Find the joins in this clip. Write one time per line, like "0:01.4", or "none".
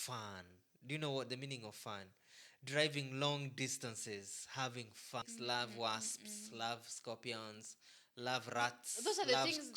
0:05.3